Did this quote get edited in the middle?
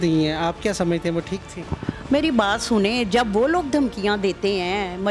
no; 0 cuts

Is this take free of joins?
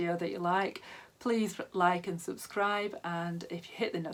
yes; 0 cuts

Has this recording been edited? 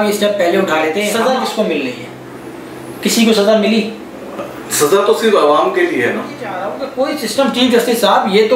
yes; 2 cuts; at 1.1 s, 6.7 s

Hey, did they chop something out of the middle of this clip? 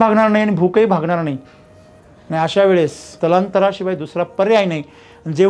yes; 1 cut; at 3.0 s

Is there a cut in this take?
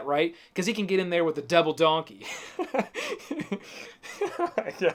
no; 0 cuts

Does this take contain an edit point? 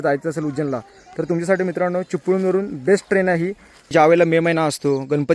yes; 1 cut; at 3.9 s

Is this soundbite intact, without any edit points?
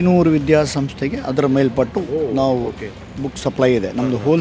yes; 0 cuts

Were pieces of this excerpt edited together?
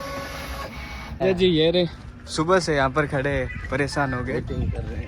yes; 1 cut; at 1.1 s

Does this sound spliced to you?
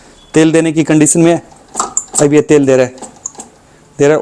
no; 0 cuts

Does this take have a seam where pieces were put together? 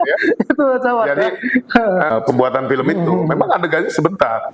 yes; 1 cut; at 2.1 s

